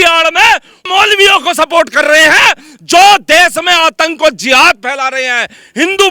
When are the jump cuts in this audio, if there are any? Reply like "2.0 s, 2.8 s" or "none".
none